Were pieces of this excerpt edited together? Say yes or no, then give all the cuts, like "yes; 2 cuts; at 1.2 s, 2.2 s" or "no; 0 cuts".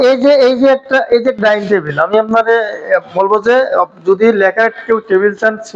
no; 0 cuts